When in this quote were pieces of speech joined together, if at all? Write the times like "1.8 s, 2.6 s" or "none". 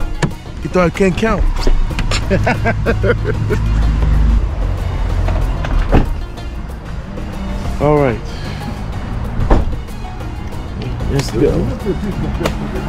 none